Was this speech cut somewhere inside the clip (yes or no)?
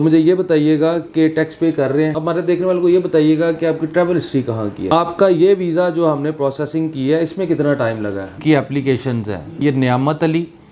yes